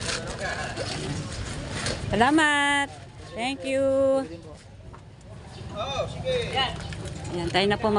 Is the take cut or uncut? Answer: uncut